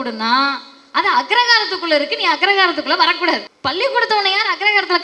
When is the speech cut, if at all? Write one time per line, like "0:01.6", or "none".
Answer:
0:03.5